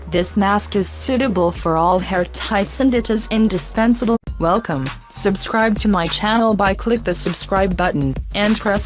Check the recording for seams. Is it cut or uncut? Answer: uncut